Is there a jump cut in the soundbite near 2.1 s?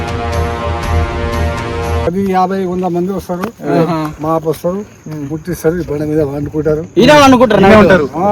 yes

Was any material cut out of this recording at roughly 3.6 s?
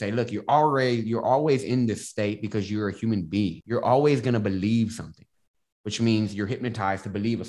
yes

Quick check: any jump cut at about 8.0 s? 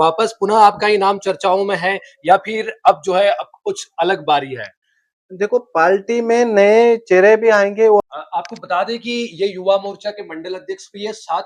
yes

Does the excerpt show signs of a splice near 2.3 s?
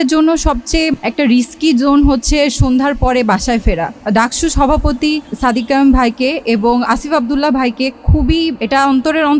no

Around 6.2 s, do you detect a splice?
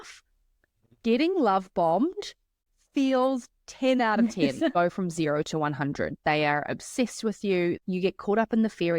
no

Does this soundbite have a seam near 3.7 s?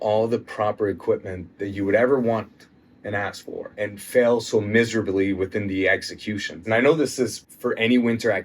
yes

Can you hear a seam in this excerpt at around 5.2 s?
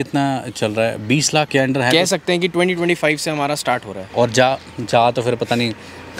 no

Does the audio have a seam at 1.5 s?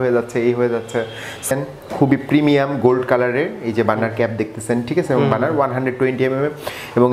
yes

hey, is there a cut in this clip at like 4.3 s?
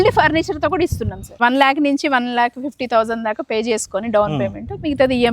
no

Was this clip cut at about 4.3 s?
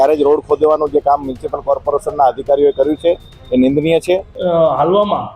yes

